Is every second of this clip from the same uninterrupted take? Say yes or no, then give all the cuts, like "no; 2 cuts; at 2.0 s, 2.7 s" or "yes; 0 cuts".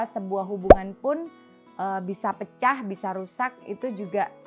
yes; 0 cuts